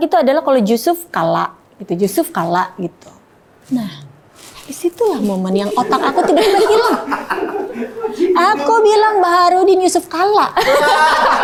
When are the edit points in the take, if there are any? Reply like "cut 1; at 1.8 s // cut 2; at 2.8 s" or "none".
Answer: none